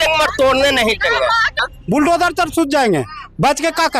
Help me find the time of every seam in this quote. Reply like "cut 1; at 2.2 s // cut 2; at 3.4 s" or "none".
cut 1; at 1.5 s